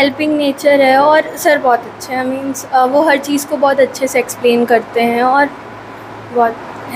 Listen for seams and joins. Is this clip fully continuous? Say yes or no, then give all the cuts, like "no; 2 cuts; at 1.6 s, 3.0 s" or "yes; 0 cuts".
yes; 0 cuts